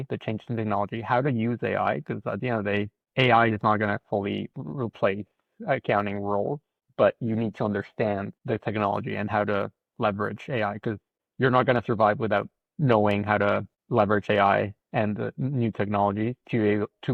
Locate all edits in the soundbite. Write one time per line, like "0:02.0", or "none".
none